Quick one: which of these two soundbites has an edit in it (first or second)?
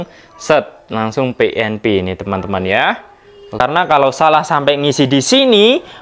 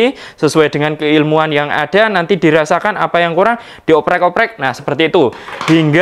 first